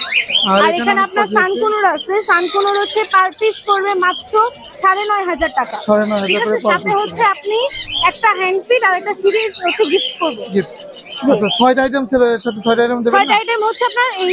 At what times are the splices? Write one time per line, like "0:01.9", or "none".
none